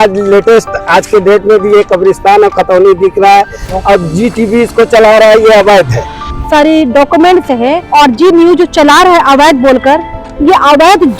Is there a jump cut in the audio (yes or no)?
yes